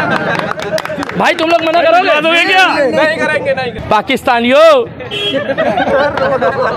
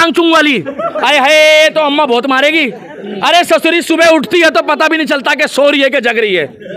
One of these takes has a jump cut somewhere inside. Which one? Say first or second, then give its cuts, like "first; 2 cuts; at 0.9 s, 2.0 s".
first; 1 cut; at 3.7 s